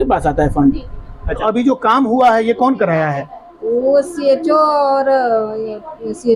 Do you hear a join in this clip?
yes; 1 cut; at 1.4 s

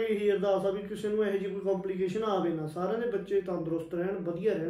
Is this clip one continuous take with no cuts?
yes; 0 cuts

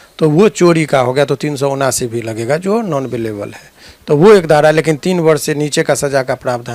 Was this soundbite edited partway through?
no; 0 cuts

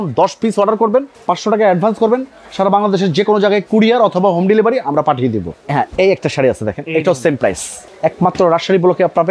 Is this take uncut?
no; 3 cuts; at 1.1 s, 5.5 s, 7.8 s

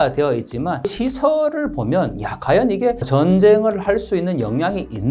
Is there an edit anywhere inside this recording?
yes; 2 cuts; at 0.9 s, 3.0 s

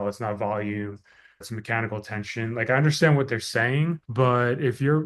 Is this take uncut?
no; 1 cut; at 1.5 s

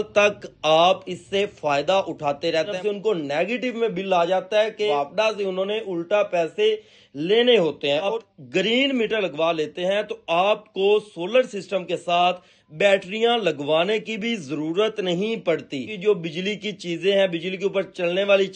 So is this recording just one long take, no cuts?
no; 4 cuts; at 2.7 s, 4.9 s, 8.2 s, 15.9 s

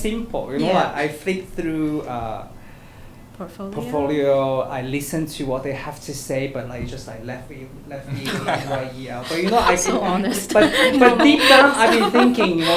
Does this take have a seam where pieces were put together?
no; 0 cuts

